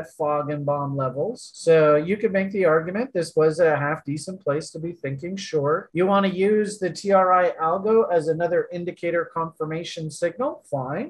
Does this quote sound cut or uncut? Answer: cut